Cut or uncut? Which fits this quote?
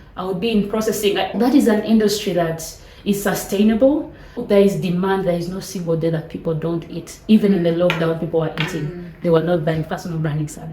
cut